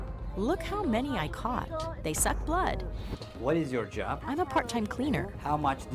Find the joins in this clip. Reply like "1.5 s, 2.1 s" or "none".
3.1 s